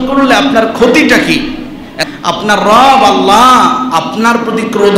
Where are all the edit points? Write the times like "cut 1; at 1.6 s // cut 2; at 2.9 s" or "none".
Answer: cut 1; at 2.0 s